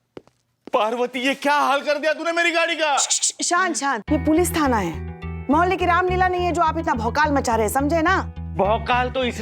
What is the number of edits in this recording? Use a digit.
1